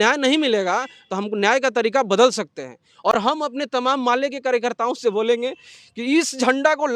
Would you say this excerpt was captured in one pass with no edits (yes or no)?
yes